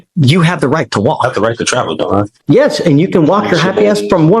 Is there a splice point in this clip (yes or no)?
yes